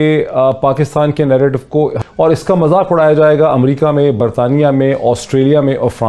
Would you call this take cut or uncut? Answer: cut